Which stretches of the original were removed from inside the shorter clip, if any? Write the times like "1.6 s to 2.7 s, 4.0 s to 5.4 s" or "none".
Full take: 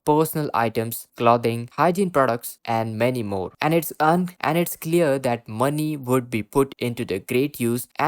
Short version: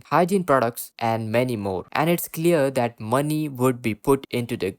3.5 s to 4.3 s